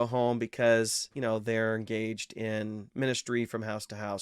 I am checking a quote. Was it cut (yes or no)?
yes